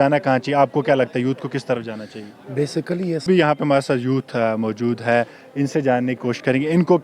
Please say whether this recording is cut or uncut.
cut